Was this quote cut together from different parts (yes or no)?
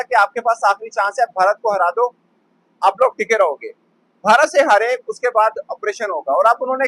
no